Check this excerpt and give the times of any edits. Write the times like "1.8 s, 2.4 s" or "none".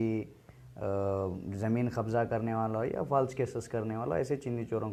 none